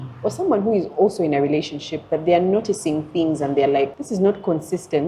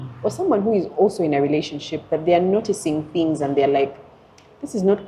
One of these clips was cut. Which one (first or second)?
first